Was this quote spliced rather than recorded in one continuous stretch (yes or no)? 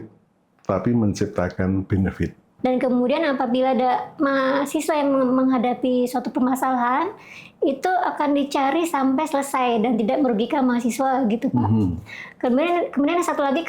yes